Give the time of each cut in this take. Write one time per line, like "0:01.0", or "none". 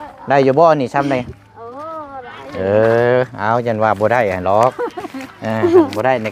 none